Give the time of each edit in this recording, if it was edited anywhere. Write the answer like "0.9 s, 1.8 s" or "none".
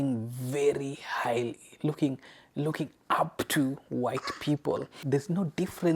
5.0 s